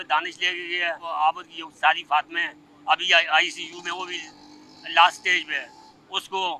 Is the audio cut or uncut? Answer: cut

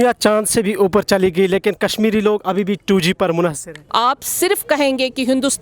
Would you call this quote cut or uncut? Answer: cut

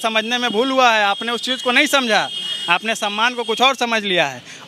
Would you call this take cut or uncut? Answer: uncut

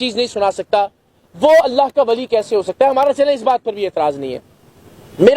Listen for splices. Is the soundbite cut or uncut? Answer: uncut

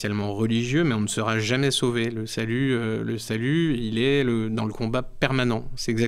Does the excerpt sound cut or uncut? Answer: uncut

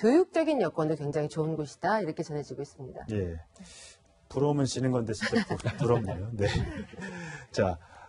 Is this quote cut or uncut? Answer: cut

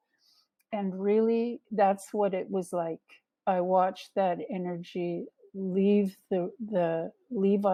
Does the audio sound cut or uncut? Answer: uncut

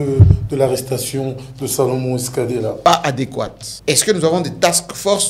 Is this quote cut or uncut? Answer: cut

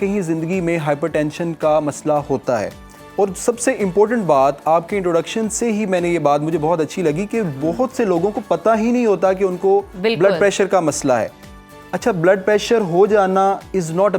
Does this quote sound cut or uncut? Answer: uncut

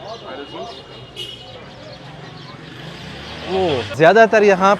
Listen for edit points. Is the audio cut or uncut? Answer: cut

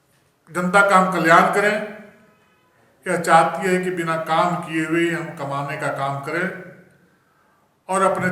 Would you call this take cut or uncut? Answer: uncut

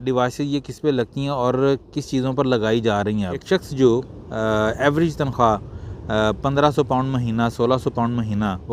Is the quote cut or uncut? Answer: cut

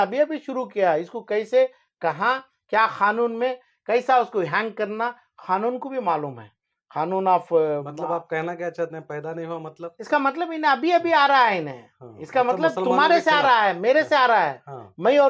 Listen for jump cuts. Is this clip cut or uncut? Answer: uncut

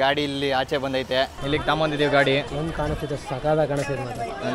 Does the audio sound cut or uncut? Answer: cut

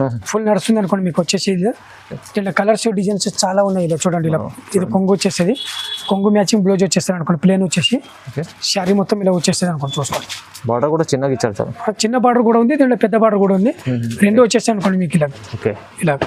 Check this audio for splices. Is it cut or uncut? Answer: uncut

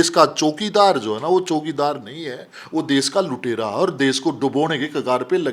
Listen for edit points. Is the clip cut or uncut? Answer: uncut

